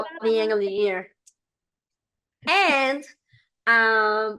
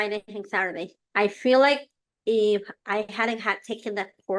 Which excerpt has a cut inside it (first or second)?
second